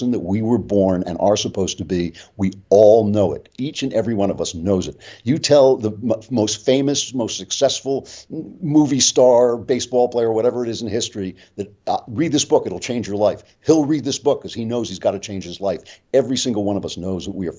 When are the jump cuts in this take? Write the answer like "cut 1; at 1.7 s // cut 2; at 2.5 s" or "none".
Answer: none